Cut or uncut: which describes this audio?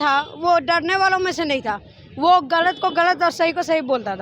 uncut